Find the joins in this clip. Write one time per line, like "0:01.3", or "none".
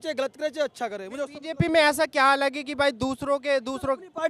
none